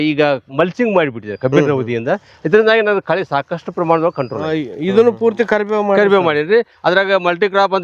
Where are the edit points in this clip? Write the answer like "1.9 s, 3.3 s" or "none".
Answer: 4.7 s